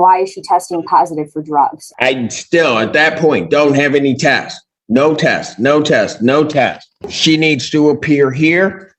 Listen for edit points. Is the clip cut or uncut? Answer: cut